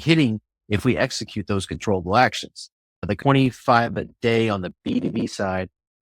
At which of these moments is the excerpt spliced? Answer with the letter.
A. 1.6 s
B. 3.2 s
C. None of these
B